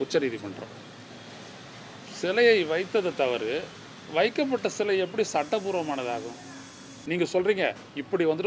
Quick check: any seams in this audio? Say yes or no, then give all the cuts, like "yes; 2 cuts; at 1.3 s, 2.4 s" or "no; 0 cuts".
yes; 1 cut; at 6.9 s